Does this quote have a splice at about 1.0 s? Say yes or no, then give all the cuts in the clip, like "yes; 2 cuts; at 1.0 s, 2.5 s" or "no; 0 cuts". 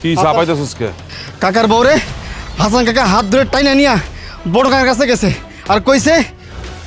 yes; 1 cut; at 1.0 s